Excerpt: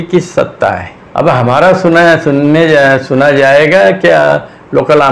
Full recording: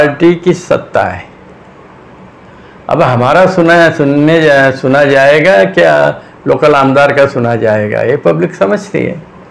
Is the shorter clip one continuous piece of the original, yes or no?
no